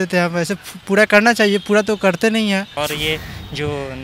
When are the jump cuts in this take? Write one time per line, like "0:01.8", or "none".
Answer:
0:02.7